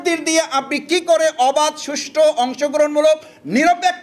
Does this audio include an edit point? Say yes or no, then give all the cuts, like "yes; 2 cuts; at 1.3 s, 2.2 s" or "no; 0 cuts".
no; 0 cuts